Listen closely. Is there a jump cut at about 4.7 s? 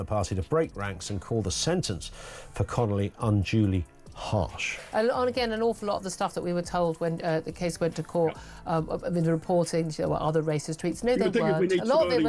yes; 1 cut; at 4.7 s

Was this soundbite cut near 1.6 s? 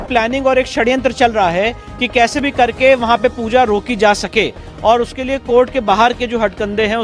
no; 0 cuts

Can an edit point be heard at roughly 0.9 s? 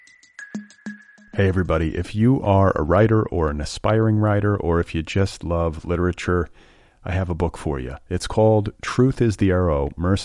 yes; 1 cut; at 0.9 s

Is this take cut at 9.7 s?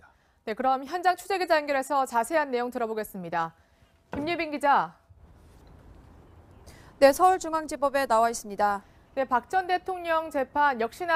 no; 0 cuts

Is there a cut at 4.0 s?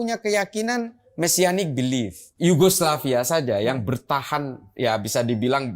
no; 1 cut; at 2.2 s

